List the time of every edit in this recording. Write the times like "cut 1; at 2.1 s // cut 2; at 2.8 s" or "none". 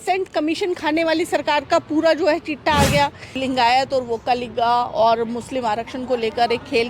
cut 1; at 3.4 s